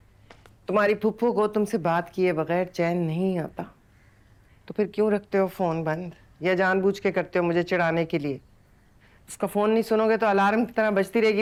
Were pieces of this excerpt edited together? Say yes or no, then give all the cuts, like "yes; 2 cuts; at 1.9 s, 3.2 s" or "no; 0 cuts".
no; 0 cuts